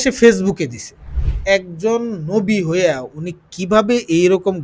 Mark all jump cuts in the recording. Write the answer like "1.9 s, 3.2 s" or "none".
1.4 s